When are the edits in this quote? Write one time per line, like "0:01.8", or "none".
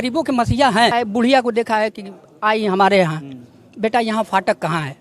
0:00.9

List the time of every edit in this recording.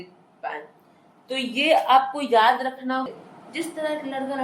0:03.1

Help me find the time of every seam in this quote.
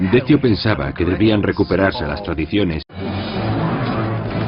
none

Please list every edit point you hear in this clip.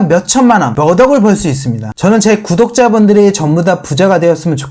none

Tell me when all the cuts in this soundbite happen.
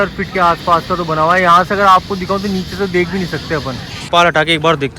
0:04.1

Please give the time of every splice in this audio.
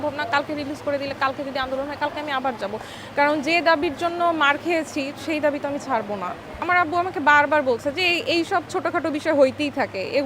0:06.6

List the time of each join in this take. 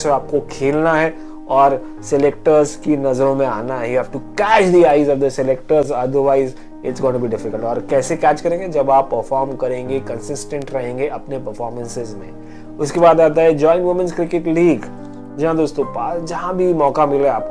none

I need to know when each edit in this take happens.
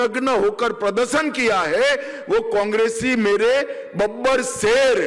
none

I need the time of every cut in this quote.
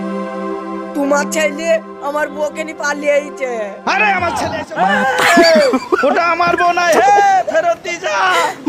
0:04.6

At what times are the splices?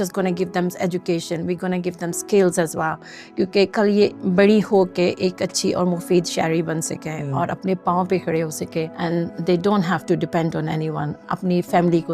0:04.2
0:08.9
0:11.2

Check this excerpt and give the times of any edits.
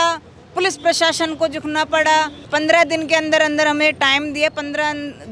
0:02.4

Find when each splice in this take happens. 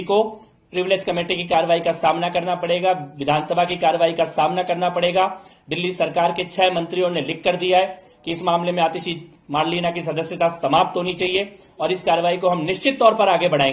none

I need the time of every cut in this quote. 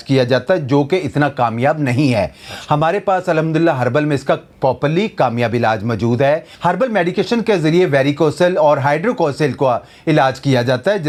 none

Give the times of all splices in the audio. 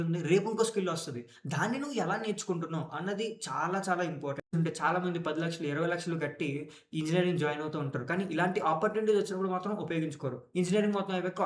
0:04.5

